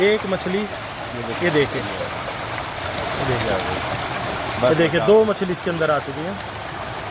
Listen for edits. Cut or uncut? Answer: uncut